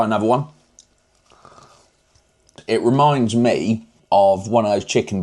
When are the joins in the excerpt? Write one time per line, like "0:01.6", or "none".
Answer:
0:02.5
0:03.9